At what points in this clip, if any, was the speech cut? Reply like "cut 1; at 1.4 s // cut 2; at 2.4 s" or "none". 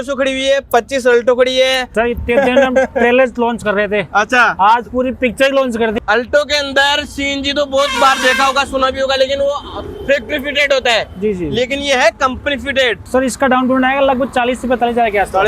cut 1; at 1.9 s // cut 2; at 5.9 s // cut 3; at 13.0 s